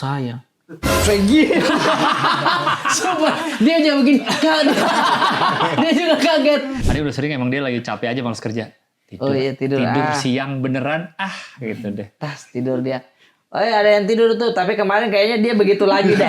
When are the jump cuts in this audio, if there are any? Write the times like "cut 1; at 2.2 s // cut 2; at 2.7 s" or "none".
cut 1; at 6.8 s

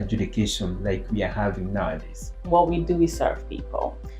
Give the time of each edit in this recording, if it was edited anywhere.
cut 1; at 2.5 s

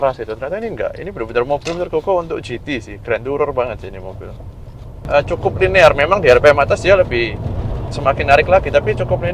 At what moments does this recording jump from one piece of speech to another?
cut 1; at 5.0 s

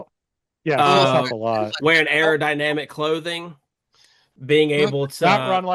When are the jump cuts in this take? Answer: none

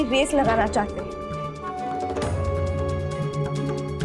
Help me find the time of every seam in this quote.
cut 1; at 0.9 s

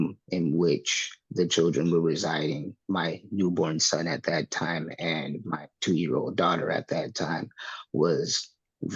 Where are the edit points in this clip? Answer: none

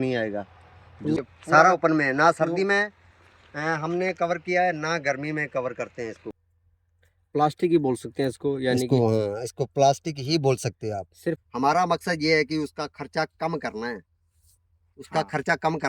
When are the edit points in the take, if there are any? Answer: cut 1; at 1.2 s // cut 2; at 6.5 s // cut 3; at 11.4 s

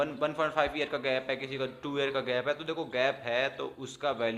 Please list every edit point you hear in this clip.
none

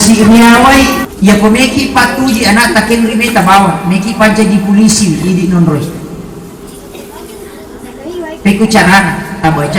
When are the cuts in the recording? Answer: cut 1; at 1.0 s

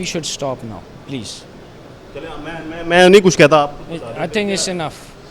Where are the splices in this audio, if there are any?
none

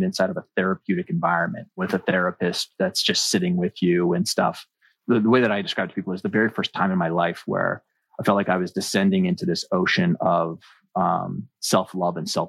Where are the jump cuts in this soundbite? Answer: cut 1; at 1.8 s // cut 2; at 4.9 s

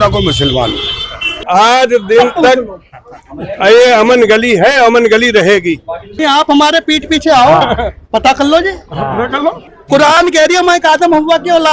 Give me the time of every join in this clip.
cut 1; at 1.4 s // cut 2; at 6.2 s // cut 3; at 9.7 s

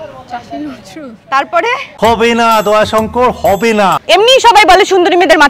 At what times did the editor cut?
cut 1; at 1.9 s // cut 2; at 4.0 s

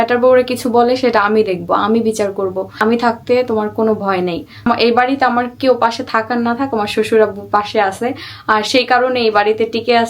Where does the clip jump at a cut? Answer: cut 1; at 2.7 s // cut 2; at 4.6 s

